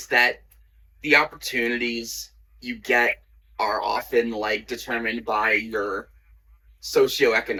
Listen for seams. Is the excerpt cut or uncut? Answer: uncut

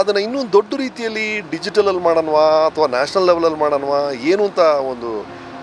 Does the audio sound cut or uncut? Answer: uncut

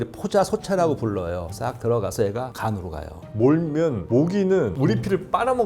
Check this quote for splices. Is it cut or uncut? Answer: cut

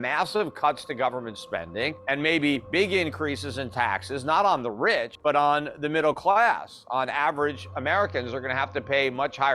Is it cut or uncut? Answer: cut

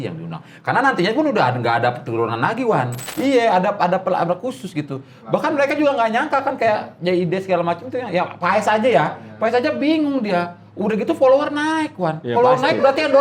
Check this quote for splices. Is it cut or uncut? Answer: cut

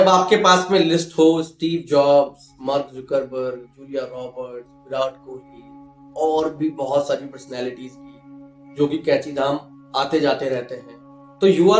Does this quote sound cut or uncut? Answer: uncut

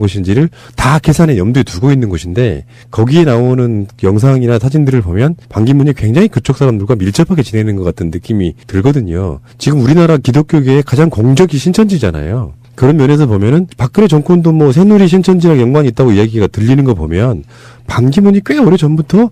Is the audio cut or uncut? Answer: cut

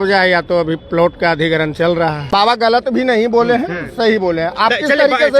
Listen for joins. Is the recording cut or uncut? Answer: cut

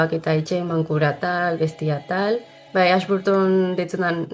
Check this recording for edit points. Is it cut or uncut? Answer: cut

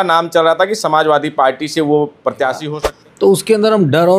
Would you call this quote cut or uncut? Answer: cut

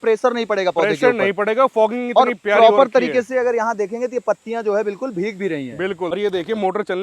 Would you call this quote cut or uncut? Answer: cut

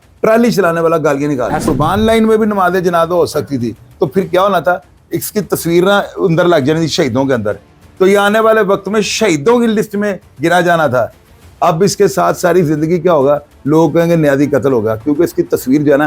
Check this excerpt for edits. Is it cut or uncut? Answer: cut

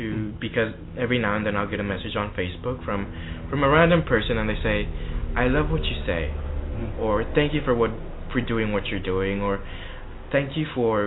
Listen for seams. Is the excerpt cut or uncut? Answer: uncut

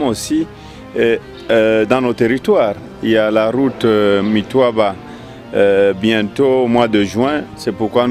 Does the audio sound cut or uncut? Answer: uncut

